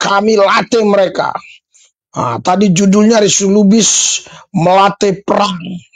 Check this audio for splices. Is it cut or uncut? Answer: uncut